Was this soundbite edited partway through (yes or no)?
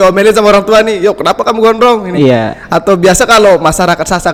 no